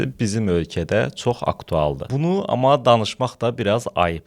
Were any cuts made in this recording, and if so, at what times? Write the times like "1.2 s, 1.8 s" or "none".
2.0 s